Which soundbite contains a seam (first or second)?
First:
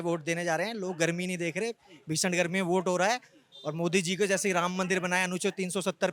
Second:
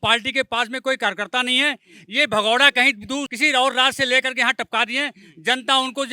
second